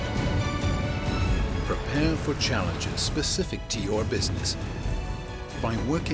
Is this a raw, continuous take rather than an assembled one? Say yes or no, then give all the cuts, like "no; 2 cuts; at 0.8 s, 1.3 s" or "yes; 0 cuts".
yes; 0 cuts